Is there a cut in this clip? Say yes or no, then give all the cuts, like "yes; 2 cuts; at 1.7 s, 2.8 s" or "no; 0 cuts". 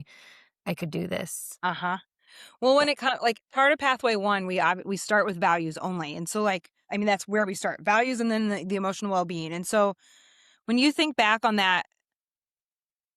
no; 0 cuts